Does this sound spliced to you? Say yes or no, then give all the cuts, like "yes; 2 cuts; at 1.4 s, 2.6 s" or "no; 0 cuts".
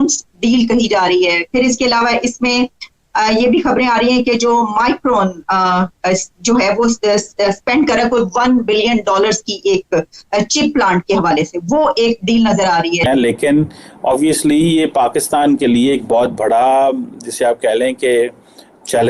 yes; 1 cut; at 13.1 s